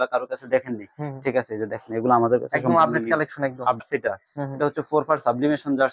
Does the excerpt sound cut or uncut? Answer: cut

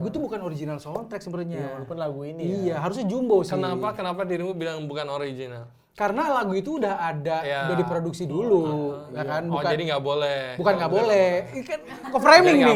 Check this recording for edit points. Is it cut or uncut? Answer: uncut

